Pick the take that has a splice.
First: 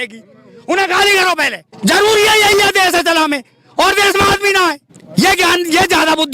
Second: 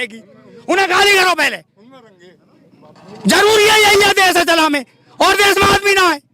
first; 2 cuts; at 1.6 s, 4.9 s

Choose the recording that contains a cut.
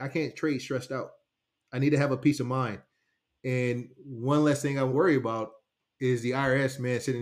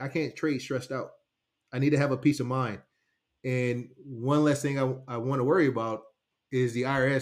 first; 1 cut; at 4.9 s

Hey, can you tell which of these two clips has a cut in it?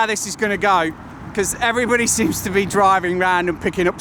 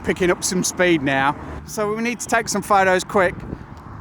second; 1 cut; at 1.6 s

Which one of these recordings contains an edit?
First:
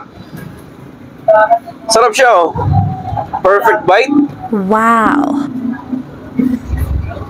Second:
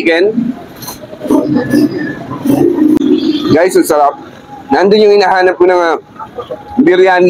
second; 1 cut; at 3.0 s

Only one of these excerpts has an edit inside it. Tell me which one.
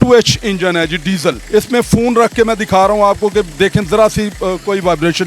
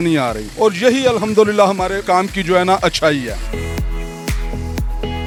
first; 1 cut; at 1.4 s

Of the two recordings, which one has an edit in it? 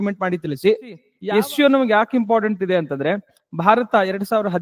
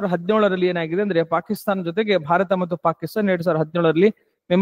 first; 1 cut; at 1.1 s

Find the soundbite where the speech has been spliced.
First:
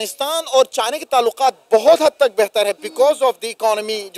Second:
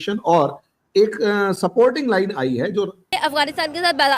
second; 1 cut; at 3.1 s

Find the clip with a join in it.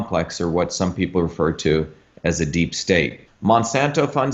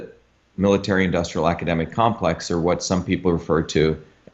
first; 1 cut; at 3.3 s

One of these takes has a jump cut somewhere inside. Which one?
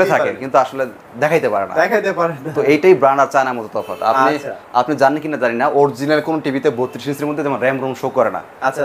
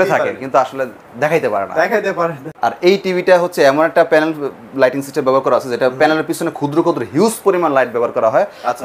second; 1 cut; at 2.5 s

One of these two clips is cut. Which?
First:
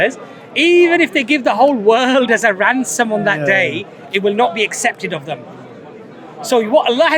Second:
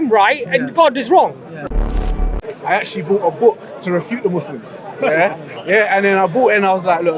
second; 1 cut; at 2.0 s

